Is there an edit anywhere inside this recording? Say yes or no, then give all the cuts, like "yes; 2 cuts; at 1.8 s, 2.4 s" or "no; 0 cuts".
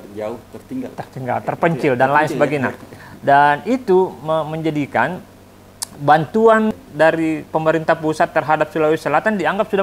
yes; 1 cut; at 6.7 s